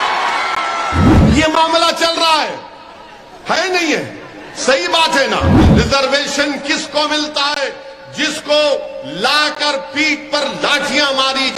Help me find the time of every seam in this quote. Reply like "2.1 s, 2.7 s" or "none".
1.1 s, 5.7 s